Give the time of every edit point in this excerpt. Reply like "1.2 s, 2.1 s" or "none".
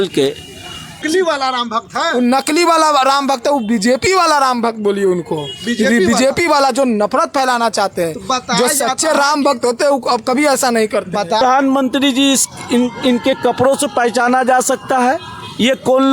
1.0 s, 11.4 s